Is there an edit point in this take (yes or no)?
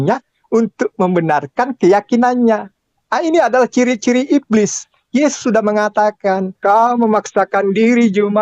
yes